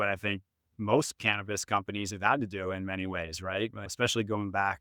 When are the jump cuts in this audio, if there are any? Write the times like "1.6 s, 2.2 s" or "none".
3.8 s